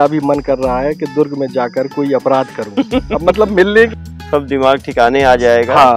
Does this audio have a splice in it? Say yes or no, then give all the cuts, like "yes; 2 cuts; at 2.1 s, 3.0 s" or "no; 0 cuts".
yes; 1 cut; at 4.0 s